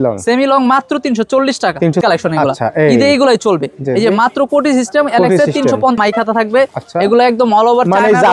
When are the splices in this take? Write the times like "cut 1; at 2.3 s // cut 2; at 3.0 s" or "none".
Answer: cut 1; at 2.0 s // cut 2; at 6.0 s